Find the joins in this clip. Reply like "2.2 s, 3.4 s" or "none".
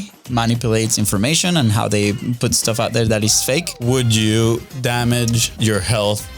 3.7 s, 5.5 s